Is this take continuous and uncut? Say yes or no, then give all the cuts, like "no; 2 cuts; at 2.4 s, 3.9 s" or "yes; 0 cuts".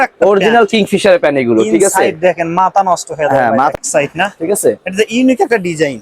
no; 1 cut; at 3.7 s